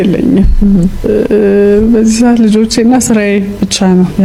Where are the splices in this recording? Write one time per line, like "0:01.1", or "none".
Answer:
none